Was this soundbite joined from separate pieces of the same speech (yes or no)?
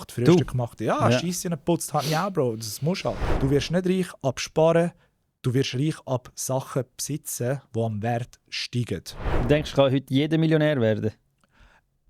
yes